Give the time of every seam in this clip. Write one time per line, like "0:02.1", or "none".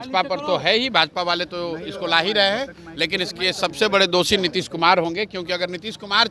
none